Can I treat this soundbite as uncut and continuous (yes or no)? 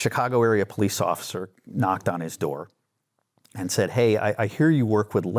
yes